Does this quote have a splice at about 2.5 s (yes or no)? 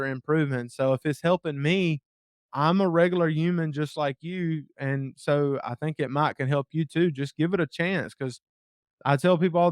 yes